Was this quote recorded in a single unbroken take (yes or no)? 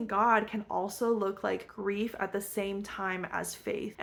yes